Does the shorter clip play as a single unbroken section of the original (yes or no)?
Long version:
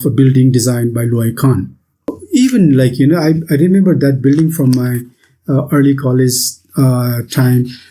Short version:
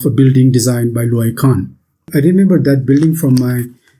no